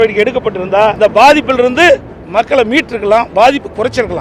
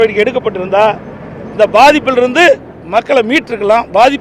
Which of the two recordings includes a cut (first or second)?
first